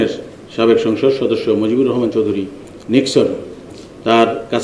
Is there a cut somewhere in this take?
no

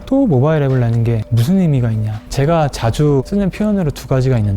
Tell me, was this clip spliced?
yes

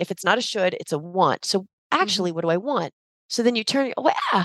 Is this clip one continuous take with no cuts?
yes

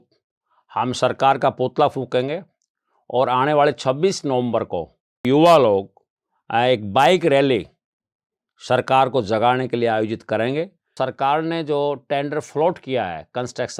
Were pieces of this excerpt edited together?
yes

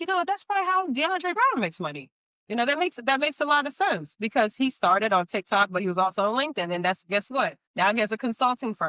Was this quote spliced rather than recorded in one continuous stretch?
yes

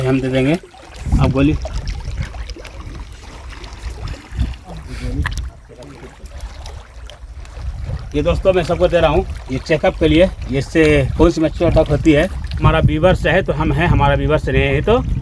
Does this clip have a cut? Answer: yes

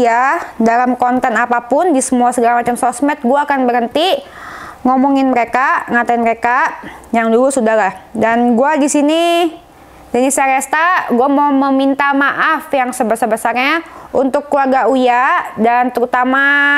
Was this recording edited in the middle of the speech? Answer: no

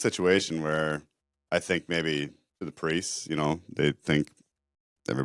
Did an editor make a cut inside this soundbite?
no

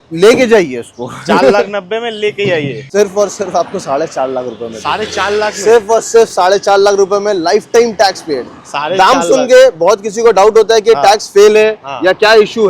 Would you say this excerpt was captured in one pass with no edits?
no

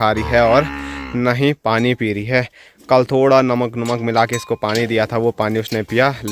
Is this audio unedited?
yes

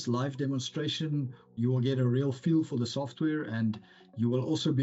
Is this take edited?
no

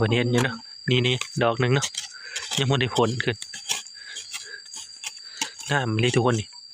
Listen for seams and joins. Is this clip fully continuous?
yes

